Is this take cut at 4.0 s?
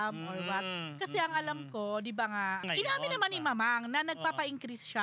no; 1 cut; at 2.6 s

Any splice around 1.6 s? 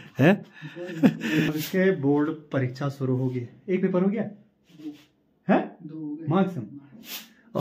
yes; 1 cut; at 1.6 s

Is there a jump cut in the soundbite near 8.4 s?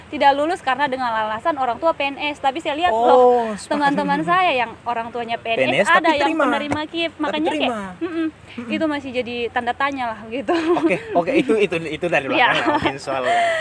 no; 0 cuts

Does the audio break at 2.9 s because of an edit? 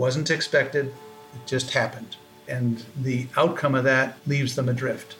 yes; 2 cuts; at 2.9 s, 4.2 s

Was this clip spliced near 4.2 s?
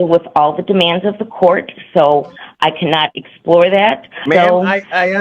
yes; 1 cut; at 4.2 s

